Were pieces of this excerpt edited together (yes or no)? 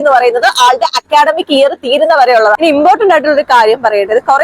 yes